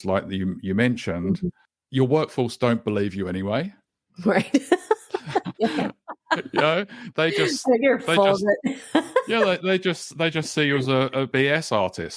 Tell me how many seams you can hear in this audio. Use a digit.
2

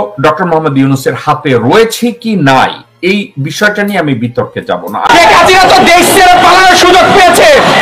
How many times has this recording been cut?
1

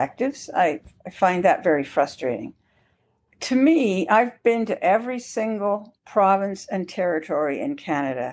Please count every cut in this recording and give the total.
1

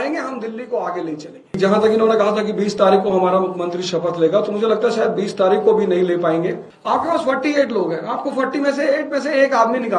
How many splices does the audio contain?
2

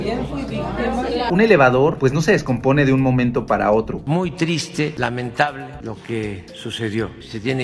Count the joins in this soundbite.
2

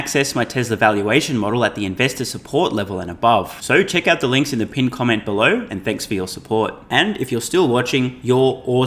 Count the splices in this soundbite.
0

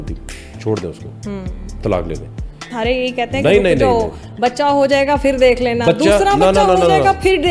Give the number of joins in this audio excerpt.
1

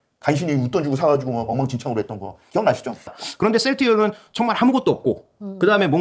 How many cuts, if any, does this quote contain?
1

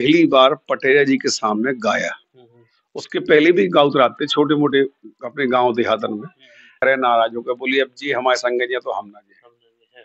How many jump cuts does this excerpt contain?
1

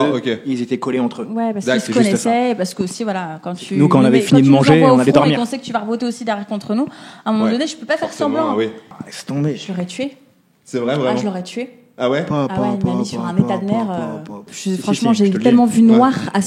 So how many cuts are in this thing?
2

